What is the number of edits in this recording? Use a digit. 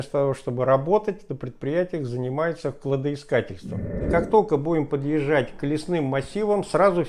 1